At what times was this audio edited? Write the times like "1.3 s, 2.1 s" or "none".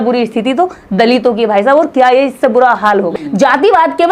3.2 s